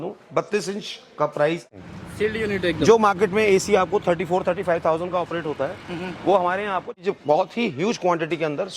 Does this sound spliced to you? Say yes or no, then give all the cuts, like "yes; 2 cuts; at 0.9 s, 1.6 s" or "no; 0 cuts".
yes; 2 cuts; at 1.7 s, 7.0 s